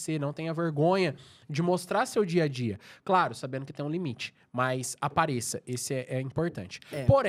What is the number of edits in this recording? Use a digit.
0